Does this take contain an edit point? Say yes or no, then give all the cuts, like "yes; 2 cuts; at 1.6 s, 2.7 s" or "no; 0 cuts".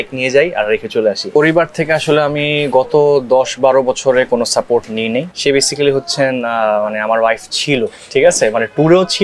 yes; 2 cuts; at 1.2 s, 5.3 s